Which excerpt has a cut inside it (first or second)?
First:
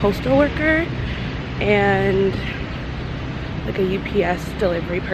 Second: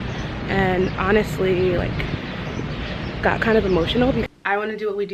second